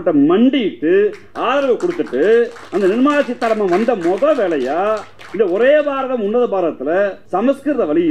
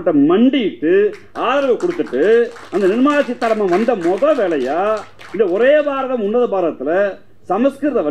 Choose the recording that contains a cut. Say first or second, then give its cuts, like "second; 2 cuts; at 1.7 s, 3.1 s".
first; 1 cut; at 7.2 s